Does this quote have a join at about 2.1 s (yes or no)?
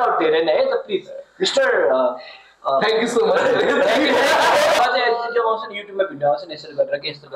no